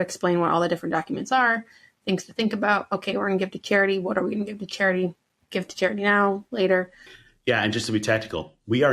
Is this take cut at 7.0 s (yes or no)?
yes